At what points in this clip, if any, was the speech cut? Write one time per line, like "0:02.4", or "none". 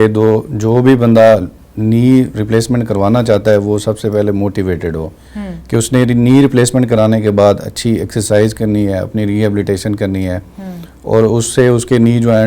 none